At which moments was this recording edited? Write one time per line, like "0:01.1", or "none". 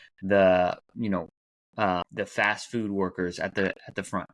0:02.1